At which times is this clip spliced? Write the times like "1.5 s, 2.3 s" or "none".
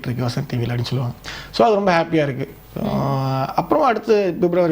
none